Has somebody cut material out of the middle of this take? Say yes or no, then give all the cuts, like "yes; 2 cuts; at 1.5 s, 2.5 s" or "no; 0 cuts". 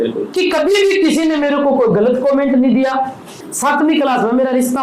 yes; 1 cut; at 3.3 s